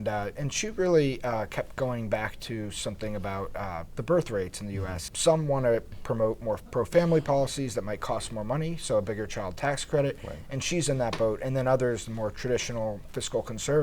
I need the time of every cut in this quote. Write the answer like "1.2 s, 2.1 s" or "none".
5.1 s